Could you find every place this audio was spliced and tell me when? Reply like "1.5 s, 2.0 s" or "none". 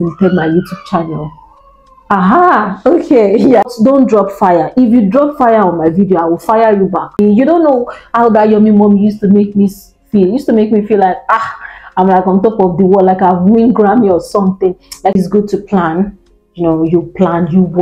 3.7 s, 7.2 s, 15.1 s